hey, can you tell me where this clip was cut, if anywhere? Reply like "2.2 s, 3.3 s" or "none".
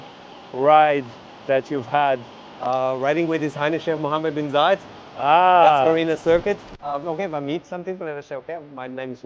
6.7 s